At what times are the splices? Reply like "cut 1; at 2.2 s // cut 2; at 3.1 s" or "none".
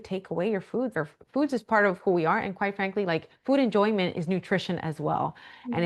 cut 1; at 0.9 s